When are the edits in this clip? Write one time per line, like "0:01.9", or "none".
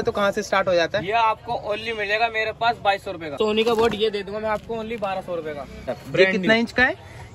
0:03.4
0:05.9